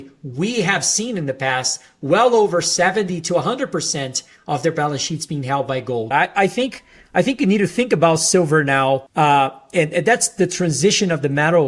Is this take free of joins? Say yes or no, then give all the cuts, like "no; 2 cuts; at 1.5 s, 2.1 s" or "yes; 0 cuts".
no; 2 cuts; at 6.1 s, 9.1 s